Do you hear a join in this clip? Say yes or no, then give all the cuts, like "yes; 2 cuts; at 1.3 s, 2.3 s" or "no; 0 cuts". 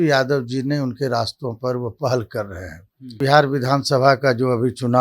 yes; 1 cut; at 3.2 s